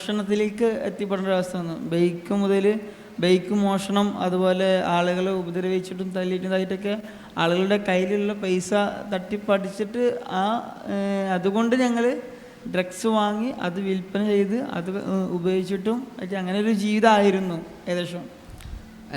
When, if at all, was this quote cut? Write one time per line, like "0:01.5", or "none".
none